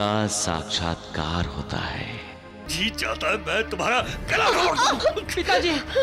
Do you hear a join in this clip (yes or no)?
yes